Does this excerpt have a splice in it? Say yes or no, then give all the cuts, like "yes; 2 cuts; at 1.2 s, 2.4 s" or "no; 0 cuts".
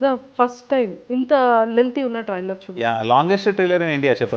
yes; 1 cut; at 1.0 s